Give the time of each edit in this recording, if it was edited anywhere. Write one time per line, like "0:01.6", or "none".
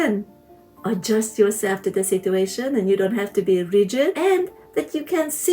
0:04.2